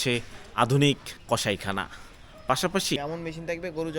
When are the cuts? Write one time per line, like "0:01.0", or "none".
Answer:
0:01.1
0:03.0